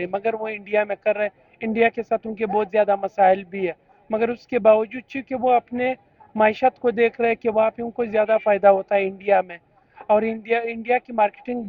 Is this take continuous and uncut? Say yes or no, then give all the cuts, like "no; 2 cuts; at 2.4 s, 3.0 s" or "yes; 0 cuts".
yes; 0 cuts